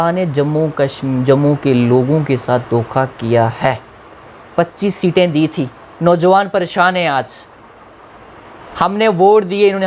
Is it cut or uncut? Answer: uncut